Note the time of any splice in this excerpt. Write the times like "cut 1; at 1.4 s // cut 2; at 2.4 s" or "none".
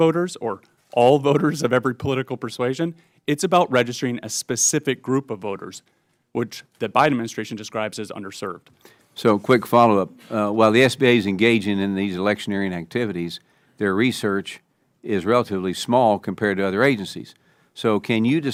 none